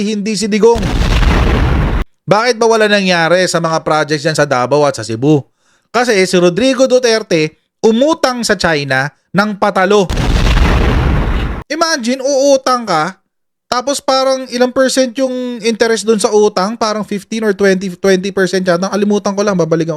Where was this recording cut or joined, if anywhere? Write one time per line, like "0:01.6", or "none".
0:02.0
0:11.6